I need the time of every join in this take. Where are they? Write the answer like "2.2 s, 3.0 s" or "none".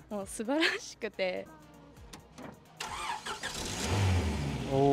1.5 s